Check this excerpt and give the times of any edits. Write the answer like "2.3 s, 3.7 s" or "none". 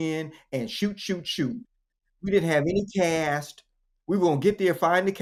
none